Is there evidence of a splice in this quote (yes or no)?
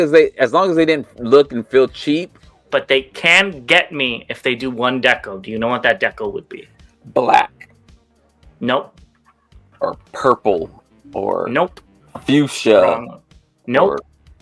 yes